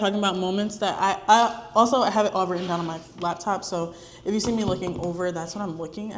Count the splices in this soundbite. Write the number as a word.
zero